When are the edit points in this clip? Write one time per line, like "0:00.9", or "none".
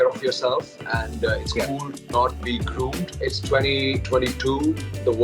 0:02.4